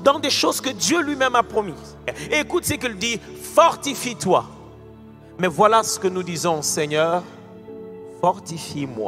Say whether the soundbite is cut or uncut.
cut